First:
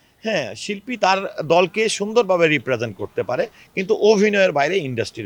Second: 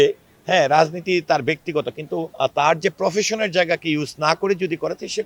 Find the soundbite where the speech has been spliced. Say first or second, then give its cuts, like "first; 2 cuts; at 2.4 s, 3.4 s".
second; 1 cut; at 2.3 s